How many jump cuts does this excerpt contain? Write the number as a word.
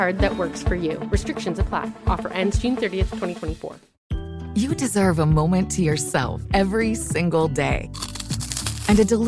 one